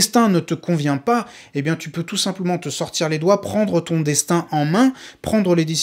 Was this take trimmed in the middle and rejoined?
no; 0 cuts

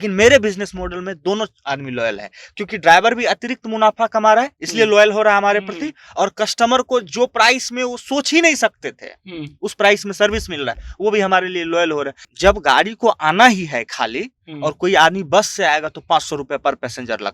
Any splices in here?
yes; 1 cut; at 12.2 s

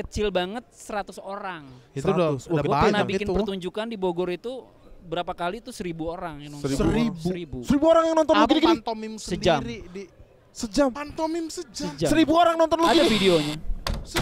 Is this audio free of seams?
yes; 0 cuts

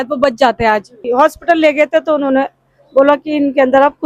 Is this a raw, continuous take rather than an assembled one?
no; 1 cut; at 1.0 s

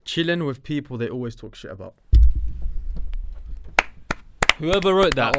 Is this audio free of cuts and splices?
yes; 0 cuts

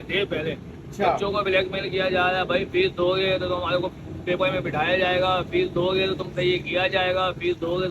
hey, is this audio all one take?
yes; 0 cuts

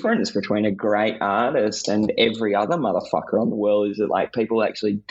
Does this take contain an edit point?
no; 0 cuts

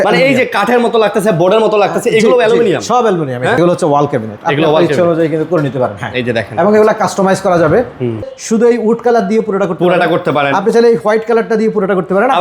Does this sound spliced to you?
yes; 2 cuts; at 3.6 s, 8.3 s

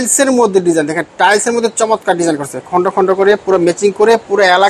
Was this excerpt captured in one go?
yes; 0 cuts

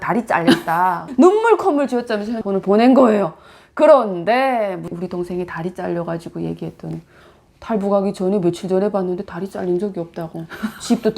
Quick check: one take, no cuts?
no; 4 cuts; at 1.0 s, 2.3 s, 4.9 s, 7.1 s

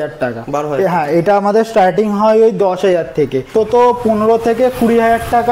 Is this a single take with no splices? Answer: no; 1 cut; at 3.5 s

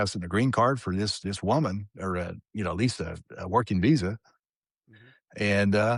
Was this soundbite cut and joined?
no; 0 cuts

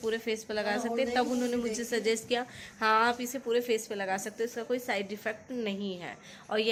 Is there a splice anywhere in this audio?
no; 0 cuts

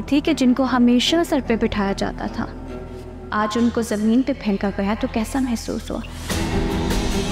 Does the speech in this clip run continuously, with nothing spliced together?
yes; 0 cuts

